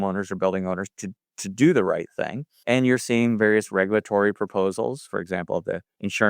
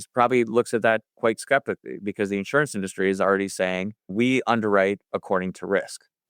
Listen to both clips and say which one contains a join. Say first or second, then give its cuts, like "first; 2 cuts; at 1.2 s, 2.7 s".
second; 1 cut; at 2.1 s